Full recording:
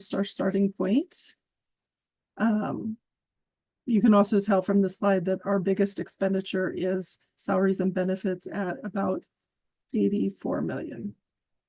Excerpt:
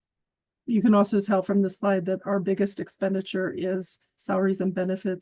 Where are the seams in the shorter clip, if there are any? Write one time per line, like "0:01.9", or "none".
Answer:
none